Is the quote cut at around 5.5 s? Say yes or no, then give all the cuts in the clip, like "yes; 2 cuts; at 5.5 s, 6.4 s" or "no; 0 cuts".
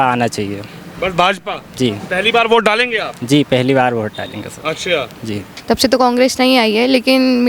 yes; 1 cut; at 5.5 s